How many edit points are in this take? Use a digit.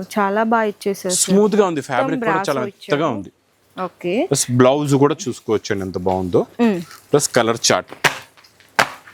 0